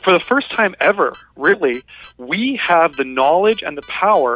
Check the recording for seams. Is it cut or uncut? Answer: uncut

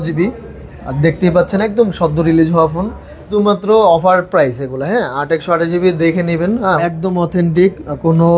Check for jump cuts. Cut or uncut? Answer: cut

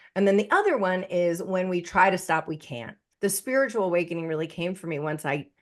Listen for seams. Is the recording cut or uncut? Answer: cut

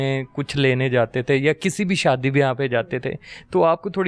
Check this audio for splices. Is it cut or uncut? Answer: uncut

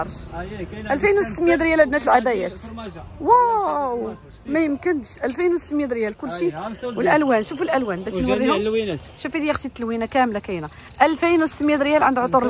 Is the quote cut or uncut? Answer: uncut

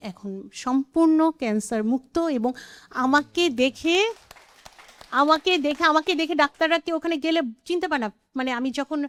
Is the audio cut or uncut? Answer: uncut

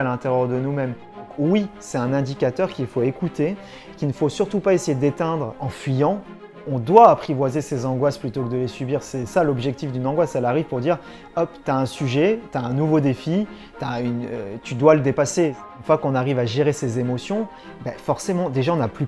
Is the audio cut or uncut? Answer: cut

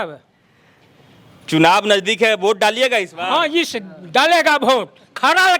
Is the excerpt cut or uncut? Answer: uncut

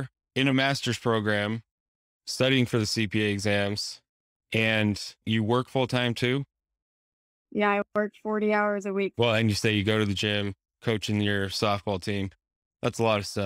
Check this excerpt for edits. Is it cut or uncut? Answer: cut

